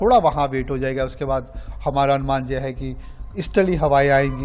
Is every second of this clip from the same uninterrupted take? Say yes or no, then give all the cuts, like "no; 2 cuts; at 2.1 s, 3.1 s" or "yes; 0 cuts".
yes; 0 cuts